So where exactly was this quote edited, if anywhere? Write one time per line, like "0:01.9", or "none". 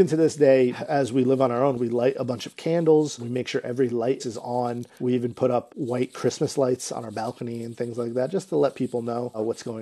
0:00.8
0:01.8
0:03.2
0:04.5
0:05.7

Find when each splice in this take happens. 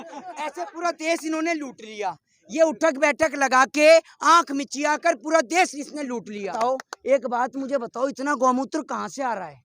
0:06.5

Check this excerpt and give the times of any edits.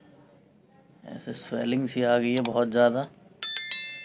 none

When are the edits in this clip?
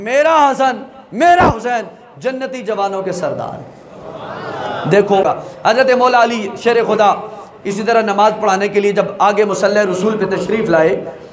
0:05.2

